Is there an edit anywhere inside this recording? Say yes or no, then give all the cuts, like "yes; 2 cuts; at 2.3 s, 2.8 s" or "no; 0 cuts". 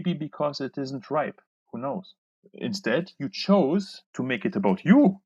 yes; 2 cuts; at 2.5 s, 4.1 s